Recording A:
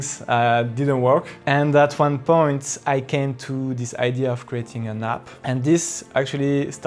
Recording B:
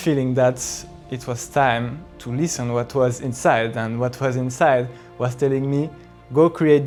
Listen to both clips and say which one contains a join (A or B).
A